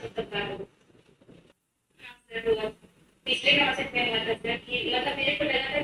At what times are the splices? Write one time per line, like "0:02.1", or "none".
0:01.7